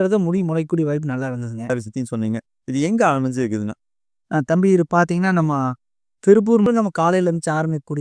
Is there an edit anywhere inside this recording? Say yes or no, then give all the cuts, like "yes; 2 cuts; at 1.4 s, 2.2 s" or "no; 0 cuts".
yes; 2 cuts; at 1.7 s, 6.7 s